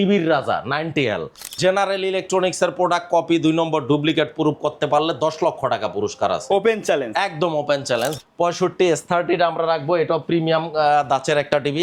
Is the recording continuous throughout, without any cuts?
no; 2 cuts; at 1.6 s, 8.2 s

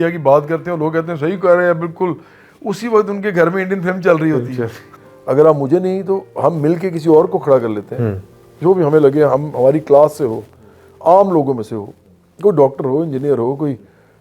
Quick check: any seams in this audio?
yes; 1 cut; at 4.8 s

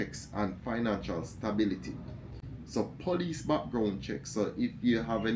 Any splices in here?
no; 0 cuts

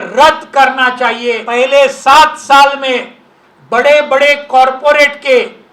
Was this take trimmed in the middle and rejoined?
yes; 1 cut; at 1.4 s

